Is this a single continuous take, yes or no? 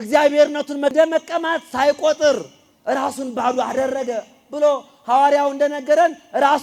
no